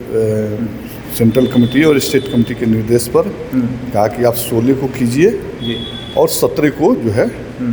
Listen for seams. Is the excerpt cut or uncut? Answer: uncut